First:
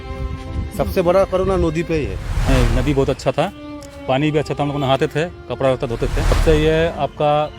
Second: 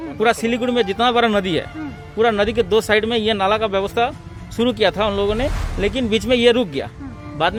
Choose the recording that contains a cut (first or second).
first